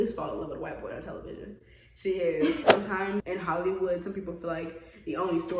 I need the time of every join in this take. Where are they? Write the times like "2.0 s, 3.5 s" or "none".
2.6 s